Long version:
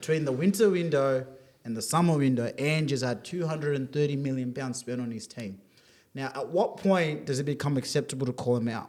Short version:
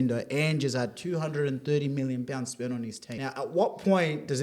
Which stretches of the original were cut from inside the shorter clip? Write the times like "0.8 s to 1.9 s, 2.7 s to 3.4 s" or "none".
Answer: 5.3 s to 6.0 s